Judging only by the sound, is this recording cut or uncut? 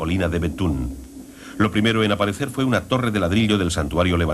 cut